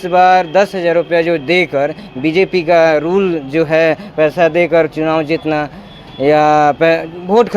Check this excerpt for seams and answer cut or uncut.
uncut